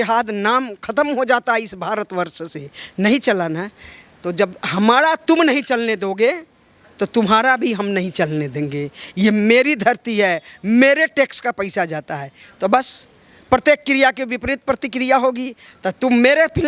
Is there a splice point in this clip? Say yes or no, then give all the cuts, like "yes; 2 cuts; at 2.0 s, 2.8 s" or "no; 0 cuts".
no; 0 cuts